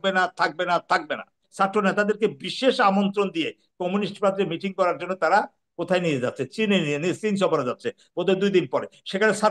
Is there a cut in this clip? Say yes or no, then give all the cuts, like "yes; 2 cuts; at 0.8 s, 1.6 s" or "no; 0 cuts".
yes; 1 cut; at 1.4 s